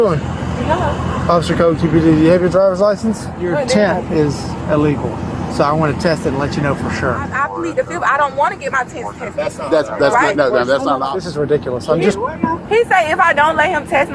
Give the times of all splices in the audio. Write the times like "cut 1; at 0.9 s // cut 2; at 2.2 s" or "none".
cut 1; at 3.4 s // cut 2; at 7.3 s // cut 3; at 11.1 s